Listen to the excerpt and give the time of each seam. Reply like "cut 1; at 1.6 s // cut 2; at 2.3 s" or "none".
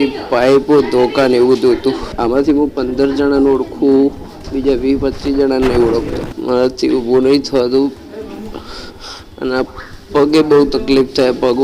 cut 1; at 2.1 s // cut 2; at 6.3 s